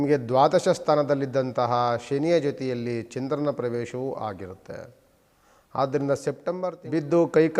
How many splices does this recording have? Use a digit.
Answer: 1